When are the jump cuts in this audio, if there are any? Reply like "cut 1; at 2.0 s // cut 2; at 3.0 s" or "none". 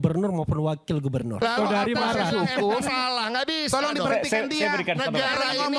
cut 1; at 1.4 s